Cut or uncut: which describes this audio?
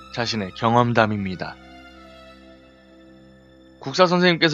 cut